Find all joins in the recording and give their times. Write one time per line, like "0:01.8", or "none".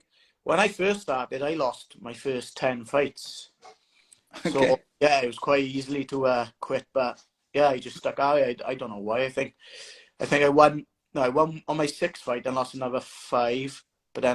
none